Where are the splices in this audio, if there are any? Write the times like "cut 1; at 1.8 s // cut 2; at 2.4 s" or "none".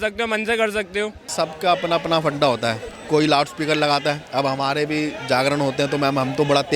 cut 1; at 1.3 s